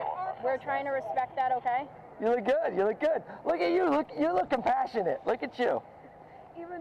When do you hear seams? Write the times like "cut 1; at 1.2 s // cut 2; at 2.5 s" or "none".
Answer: cut 1; at 2.0 s